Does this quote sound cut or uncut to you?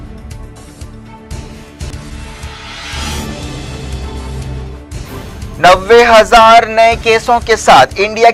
uncut